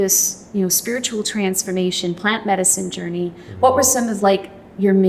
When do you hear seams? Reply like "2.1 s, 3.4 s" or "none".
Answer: none